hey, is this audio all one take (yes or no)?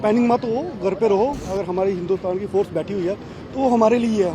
no